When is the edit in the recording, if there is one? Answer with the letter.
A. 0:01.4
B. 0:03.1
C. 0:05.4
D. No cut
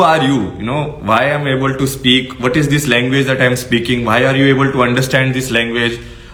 D